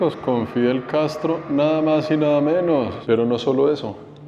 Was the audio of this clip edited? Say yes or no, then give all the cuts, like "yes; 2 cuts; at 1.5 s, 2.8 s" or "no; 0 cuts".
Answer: yes; 1 cut; at 3.0 s